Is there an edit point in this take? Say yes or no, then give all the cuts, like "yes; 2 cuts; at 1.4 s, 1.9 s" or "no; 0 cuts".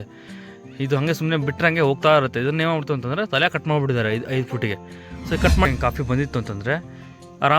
yes; 1 cut; at 5.7 s